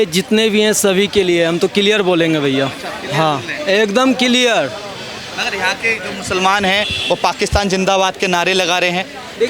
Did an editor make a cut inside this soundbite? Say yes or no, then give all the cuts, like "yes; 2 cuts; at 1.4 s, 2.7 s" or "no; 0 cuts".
no; 0 cuts